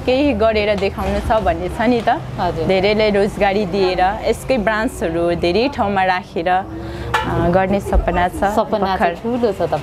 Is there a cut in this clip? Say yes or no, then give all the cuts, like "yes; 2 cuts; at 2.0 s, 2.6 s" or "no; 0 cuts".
no; 0 cuts